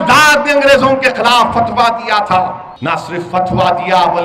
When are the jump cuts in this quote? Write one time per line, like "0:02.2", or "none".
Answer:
0:02.7